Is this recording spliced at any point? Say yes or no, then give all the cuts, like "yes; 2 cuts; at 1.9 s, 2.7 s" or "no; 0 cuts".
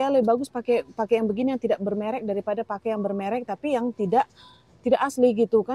no; 0 cuts